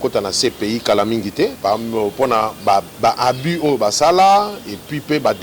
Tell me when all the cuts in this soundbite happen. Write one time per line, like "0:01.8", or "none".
0:01.6